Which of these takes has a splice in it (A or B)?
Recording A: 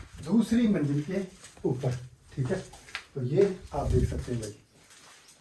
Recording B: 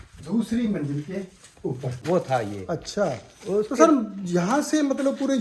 B